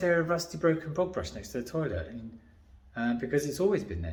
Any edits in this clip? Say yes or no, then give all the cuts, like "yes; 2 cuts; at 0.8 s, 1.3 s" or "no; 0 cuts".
no; 0 cuts